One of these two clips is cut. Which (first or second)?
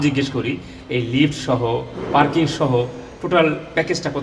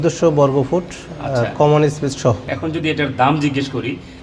second